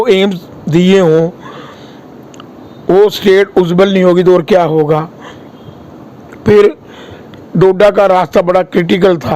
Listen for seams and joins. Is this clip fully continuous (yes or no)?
yes